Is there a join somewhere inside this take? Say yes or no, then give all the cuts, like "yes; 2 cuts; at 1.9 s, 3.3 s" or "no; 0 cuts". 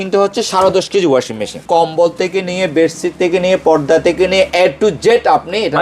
yes; 1 cut; at 1.5 s